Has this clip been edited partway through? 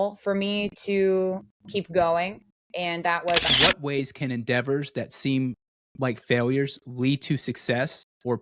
yes; 1 cut; at 3.5 s

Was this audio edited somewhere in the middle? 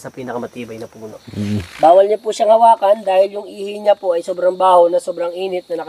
yes; 1 cut; at 1.2 s

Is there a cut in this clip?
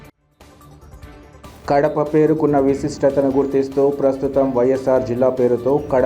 no; 0 cuts

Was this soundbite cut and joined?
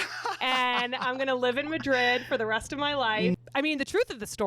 yes; 1 cut; at 3.3 s

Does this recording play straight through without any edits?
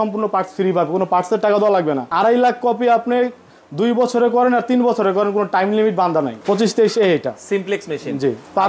no; 2 cuts; at 2.1 s, 6.4 s

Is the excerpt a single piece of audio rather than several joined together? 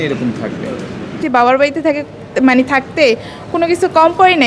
no; 1 cut; at 1.2 s

